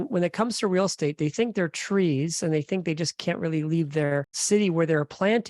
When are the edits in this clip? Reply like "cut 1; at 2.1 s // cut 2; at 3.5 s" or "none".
cut 1; at 4.4 s